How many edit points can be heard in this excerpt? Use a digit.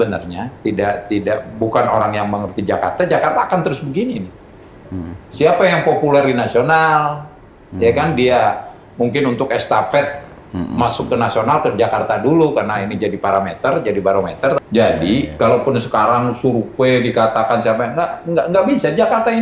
1